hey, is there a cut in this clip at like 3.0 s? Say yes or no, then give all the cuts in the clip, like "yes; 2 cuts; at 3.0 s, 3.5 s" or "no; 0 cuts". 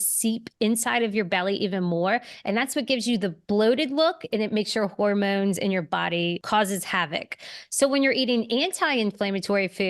no; 1 cut; at 6.4 s